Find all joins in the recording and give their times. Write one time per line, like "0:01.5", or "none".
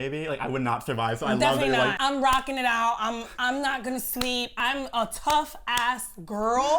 0:02.0
0:04.5

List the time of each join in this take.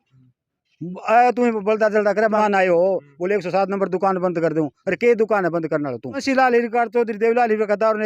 0:02.4
0:06.2

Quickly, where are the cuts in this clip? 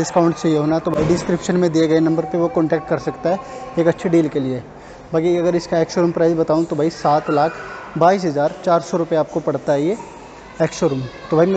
none

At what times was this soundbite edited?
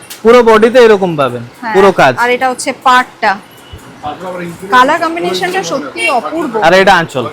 none

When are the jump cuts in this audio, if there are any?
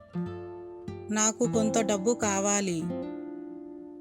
0:01.0

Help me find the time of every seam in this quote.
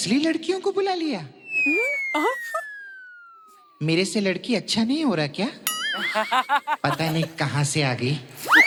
none

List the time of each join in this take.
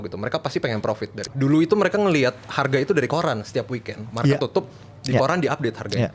0:01.2

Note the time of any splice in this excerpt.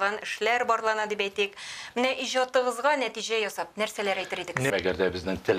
0:04.7

